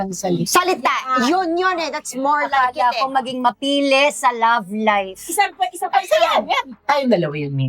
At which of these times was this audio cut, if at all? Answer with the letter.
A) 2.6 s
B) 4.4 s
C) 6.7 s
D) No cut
C